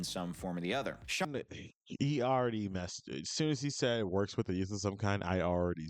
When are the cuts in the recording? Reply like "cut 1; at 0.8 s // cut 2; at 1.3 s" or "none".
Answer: cut 1; at 1.3 s